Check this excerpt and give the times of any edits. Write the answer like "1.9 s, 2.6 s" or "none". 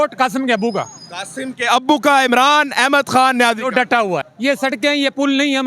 4.3 s

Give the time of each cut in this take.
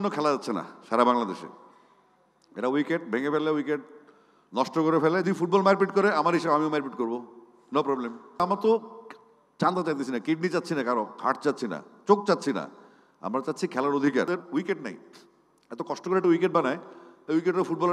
5.2 s, 8.4 s, 14.3 s

